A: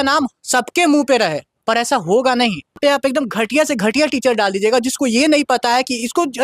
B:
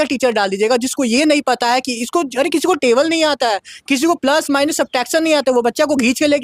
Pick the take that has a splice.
A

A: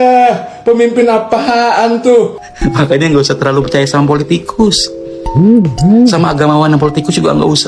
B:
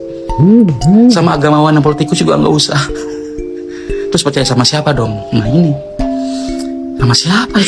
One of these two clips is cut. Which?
A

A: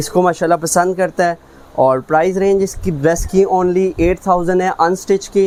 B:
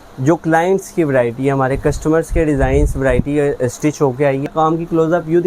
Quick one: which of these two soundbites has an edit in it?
B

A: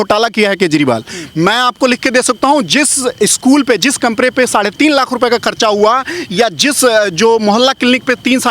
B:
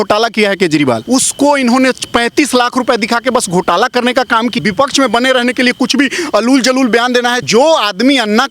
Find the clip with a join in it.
B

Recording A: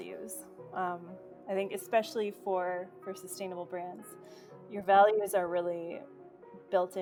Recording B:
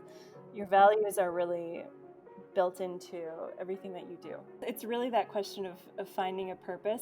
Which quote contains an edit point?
B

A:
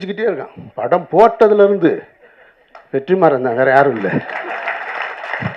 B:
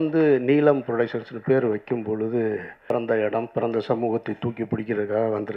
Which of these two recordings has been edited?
B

